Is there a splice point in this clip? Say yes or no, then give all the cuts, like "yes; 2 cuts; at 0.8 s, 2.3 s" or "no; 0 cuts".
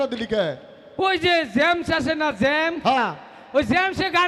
no; 0 cuts